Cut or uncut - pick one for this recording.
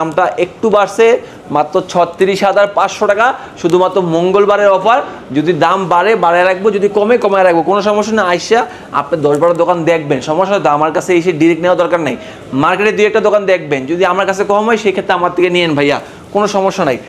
uncut